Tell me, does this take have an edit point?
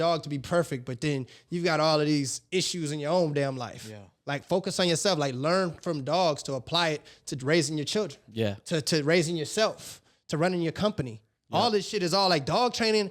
no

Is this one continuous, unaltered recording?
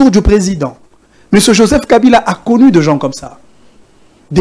yes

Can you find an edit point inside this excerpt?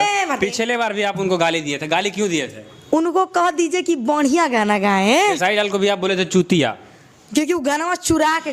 no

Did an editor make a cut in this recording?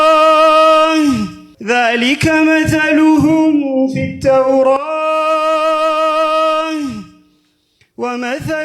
yes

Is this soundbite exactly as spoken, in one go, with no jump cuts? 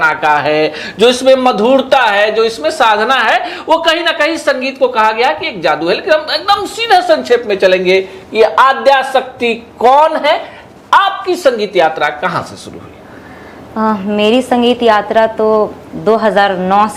yes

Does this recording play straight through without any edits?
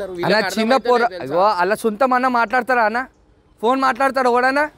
yes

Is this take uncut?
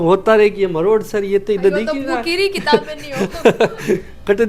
yes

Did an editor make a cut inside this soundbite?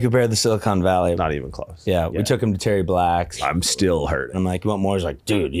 yes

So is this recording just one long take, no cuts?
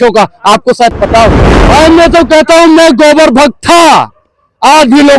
no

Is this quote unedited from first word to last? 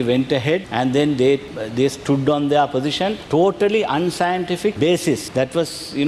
yes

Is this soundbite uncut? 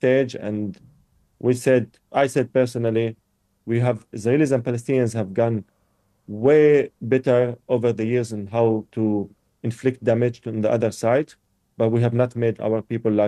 yes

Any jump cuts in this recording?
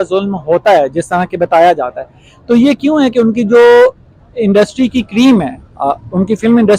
no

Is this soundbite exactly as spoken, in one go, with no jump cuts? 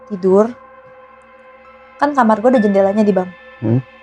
yes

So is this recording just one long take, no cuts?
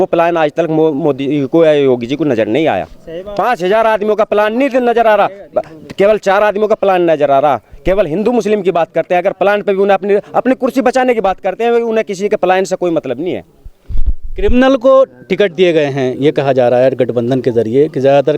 yes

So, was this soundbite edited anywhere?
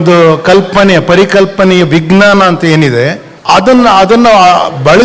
no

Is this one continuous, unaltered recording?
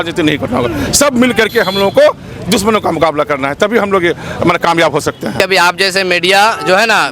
no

